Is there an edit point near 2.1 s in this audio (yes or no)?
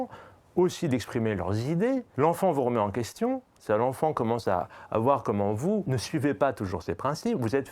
yes